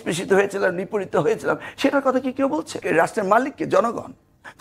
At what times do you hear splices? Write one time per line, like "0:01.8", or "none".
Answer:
0:02.8